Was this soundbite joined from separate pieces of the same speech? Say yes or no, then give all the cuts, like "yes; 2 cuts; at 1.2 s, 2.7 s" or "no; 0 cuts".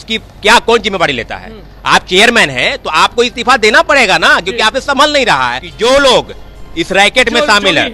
yes; 1 cut; at 5.6 s